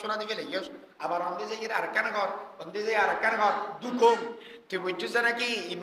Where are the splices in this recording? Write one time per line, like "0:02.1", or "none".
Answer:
0:04.5